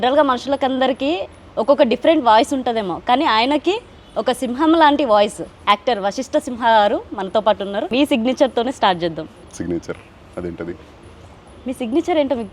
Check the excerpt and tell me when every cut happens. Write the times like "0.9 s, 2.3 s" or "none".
5.5 s, 7.9 s